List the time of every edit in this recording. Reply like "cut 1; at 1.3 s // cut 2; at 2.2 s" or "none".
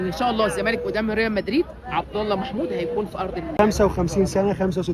cut 1; at 3.5 s